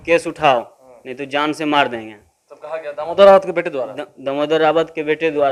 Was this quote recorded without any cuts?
yes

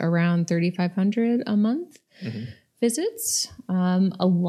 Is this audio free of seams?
yes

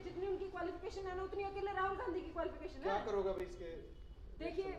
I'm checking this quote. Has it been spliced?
no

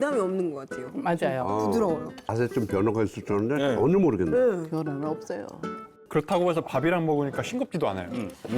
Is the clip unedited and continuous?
no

